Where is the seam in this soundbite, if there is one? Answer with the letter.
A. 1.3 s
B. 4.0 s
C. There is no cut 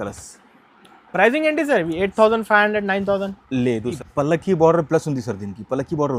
B